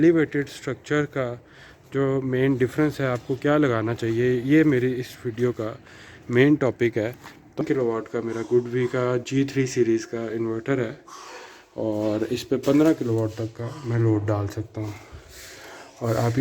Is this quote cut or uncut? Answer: cut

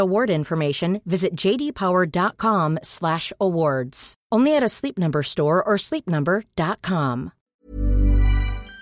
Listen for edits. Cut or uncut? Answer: cut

